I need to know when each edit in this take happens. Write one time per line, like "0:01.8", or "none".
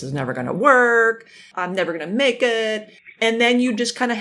0:01.5